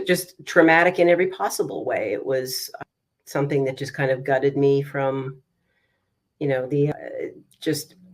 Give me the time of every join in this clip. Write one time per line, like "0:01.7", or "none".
0:02.6
0:06.9